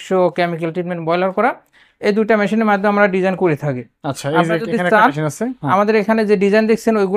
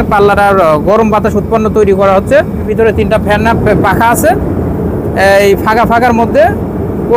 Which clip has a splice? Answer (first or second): second